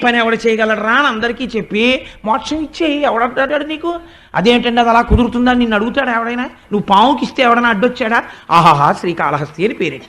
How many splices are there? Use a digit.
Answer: 1